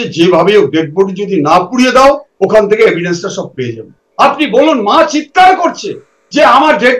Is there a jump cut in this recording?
yes; 1 cut; at 4.0 s

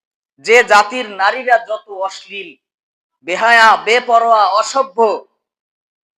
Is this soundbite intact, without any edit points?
yes; 0 cuts

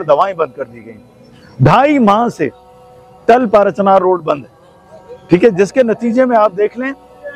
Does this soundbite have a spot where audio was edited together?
no; 0 cuts

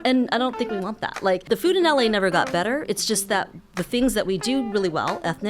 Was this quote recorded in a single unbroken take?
no; 1 cut; at 1.4 s

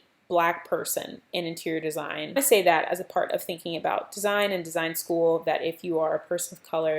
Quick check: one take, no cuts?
no; 1 cut; at 2.3 s

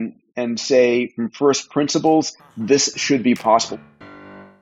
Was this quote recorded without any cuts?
no; 1 cut; at 3.7 s

